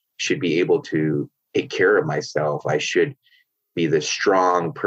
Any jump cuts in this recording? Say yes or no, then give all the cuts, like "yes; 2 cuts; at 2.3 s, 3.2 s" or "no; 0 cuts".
no; 0 cuts